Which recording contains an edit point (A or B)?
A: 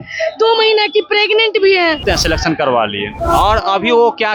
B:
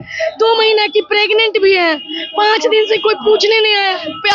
A